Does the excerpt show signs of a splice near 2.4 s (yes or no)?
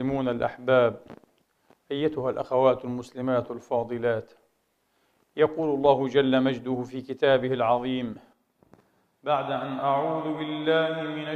yes